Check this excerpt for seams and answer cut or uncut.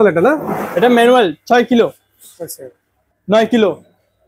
cut